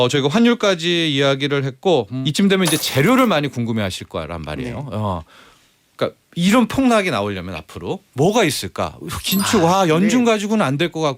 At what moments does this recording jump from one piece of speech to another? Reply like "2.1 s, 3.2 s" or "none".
2.2 s